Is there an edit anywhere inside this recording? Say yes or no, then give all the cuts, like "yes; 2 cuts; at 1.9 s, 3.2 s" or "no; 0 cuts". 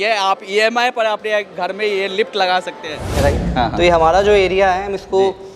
yes; 1 cut; at 3.1 s